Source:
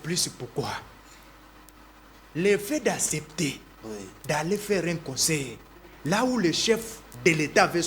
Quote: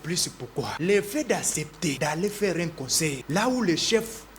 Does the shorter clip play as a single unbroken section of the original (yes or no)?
no